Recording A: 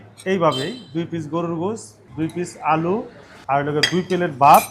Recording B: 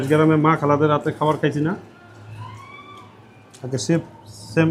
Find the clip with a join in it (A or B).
A